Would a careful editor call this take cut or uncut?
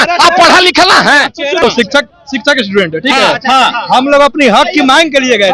cut